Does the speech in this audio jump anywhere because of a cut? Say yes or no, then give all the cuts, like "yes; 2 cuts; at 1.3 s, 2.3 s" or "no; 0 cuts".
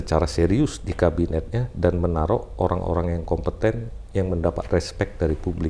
no; 0 cuts